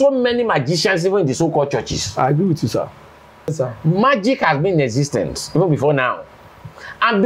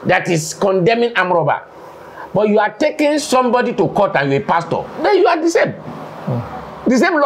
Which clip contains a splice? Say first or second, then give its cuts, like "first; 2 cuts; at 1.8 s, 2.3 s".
first; 1 cut; at 3.5 s